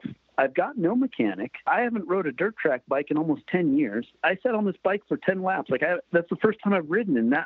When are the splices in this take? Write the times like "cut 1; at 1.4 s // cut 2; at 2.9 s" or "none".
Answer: cut 1; at 1.6 s // cut 2; at 4.2 s // cut 3; at 6.0 s